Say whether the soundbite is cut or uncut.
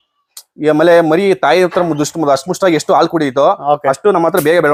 uncut